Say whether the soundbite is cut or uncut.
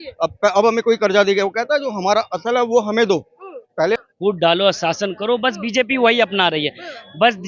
cut